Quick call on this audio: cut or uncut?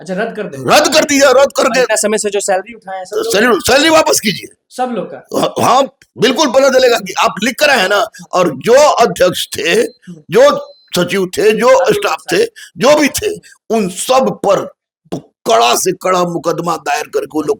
uncut